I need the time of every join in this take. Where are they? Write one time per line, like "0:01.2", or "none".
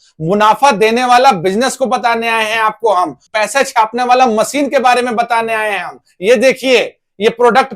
0:03.2